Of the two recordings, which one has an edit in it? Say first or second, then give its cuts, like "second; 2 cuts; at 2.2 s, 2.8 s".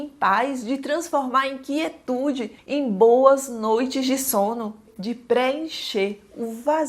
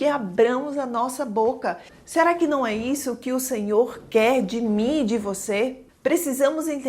second; 2 cuts; at 1.9 s, 5.8 s